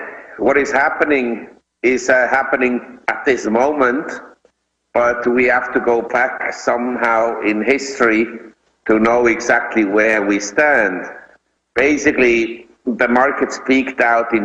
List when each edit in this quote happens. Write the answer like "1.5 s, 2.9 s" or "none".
8.6 s